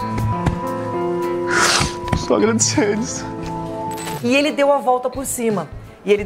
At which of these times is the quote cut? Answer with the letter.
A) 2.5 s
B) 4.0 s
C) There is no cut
B